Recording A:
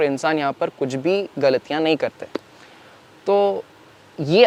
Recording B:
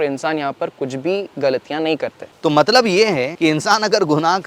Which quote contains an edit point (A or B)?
B